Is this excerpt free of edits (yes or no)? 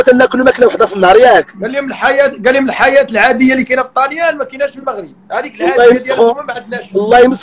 yes